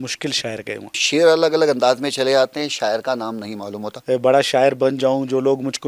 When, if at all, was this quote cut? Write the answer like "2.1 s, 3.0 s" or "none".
1.0 s, 3.9 s